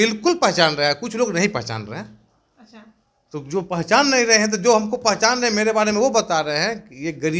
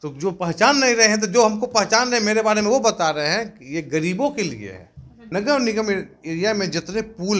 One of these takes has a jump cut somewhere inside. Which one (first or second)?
second